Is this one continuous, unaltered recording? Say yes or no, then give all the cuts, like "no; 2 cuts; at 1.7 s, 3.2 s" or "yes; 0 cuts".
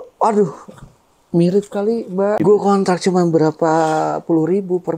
no; 1 cut; at 2.4 s